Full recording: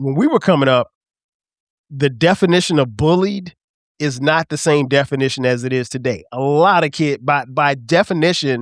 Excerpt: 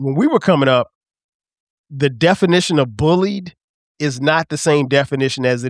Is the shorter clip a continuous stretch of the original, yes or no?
yes